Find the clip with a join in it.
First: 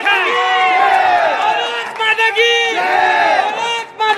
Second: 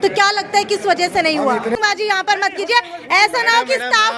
second; 1 cut; at 1.7 s

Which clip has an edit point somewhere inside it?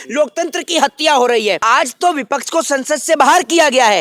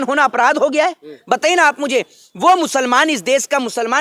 first; 1 cut; at 1.6 s

